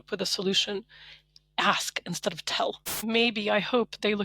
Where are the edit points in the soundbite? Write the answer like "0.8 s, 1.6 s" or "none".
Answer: 3.0 s